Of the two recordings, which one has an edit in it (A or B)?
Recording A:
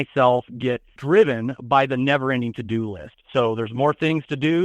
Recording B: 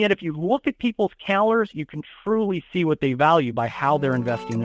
A